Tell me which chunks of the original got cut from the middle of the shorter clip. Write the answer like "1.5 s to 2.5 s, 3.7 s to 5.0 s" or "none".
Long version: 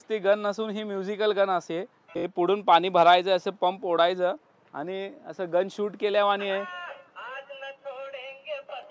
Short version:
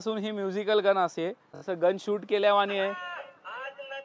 2.0 s to 5.2 s